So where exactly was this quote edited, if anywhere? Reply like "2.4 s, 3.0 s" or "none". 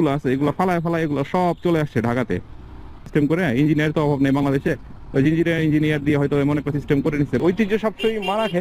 3.0 s, 7.4 s